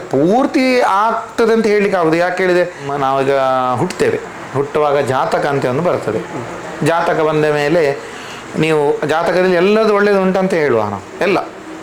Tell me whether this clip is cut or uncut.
cut